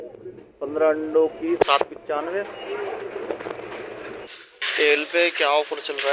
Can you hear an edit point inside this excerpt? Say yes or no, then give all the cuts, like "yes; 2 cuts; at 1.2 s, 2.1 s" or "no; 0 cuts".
yes; 1 cut; at 4.2 s